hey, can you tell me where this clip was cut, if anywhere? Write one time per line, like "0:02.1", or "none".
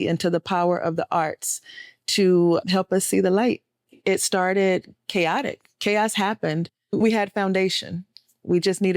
0:04.0
0:06.9